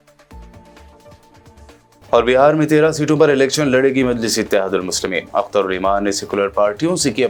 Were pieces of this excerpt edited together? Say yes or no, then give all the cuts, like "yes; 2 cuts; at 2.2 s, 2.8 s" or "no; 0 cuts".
no; 0 cuts